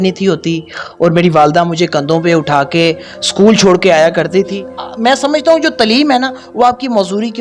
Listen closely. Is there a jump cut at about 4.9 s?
yes; 1 cut; at 4.9 s

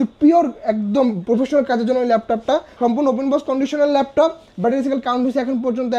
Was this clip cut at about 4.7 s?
no; 1 cut; at 2.7 s

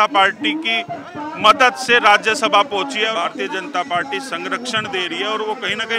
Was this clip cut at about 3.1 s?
yes; 1 cut; at 3.1 s

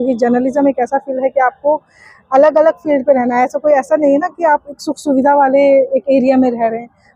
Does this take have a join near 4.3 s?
no; 0 cuts

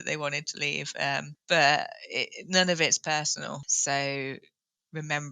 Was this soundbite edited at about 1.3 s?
yes; 2 cuts; at 1.3 s, 3.7 s

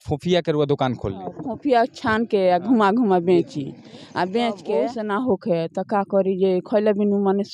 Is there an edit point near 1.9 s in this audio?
no; 1 cut; at 4.9 s

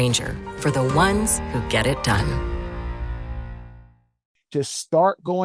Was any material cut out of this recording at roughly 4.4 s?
yes; 1 cut; at 4.4 s

